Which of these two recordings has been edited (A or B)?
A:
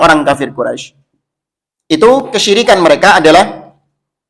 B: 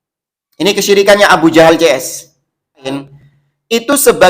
B